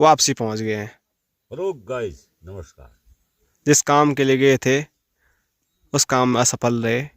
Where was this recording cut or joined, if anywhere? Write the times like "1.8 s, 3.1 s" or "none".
none

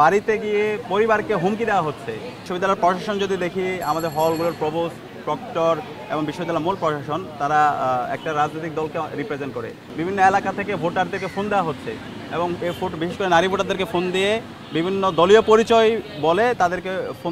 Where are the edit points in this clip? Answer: 2.4 s, 9.8 s

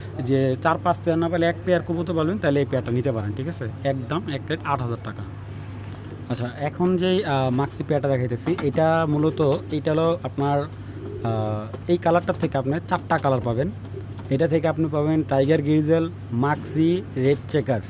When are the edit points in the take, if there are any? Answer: none

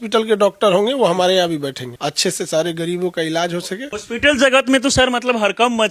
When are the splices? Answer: 1.9 s, 3.9 s

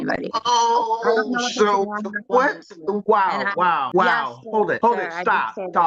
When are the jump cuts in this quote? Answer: 3.0 s, 3.9 s, 4.8 s

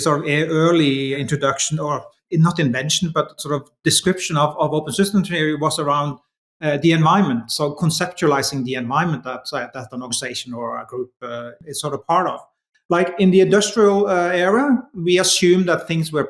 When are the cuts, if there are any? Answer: 1.2 s, 2.2 s, 11.5 s

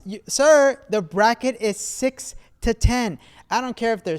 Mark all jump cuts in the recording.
none

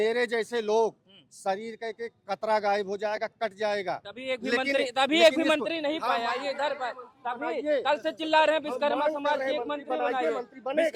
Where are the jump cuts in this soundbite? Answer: none

